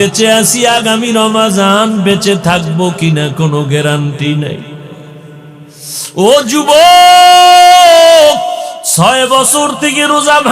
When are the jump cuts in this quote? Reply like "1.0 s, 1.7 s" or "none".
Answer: 8.8 s